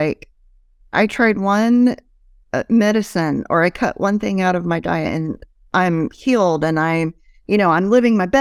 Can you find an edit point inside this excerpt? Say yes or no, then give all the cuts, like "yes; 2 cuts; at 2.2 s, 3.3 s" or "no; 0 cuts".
no; 0 cuts